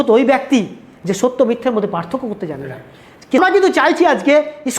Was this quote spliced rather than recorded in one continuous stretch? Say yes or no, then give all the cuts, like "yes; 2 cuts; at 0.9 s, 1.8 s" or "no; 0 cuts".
yes; 1 cut; at 3.4 s